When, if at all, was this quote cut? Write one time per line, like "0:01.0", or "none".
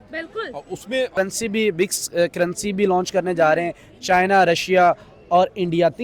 0:01.1